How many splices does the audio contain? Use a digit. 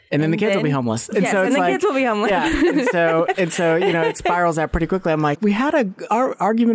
1